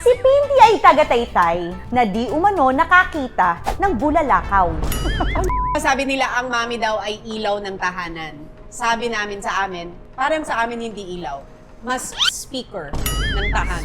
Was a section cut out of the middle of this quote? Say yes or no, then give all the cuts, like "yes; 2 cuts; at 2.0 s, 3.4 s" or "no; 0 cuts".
yes; 1 cut; at 5.8 s